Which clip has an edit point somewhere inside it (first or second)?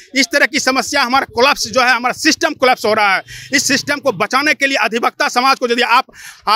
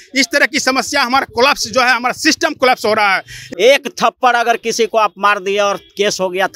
second